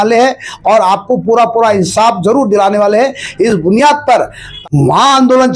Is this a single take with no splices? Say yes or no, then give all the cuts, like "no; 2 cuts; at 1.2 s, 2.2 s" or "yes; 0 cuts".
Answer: no; 1 cut; at 4.5 s